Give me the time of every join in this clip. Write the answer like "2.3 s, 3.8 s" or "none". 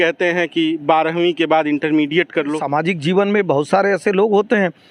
2.6 s